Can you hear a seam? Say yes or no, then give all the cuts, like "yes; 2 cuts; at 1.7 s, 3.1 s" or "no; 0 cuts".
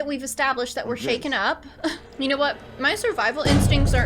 yes; 1 cut; at 2.0 s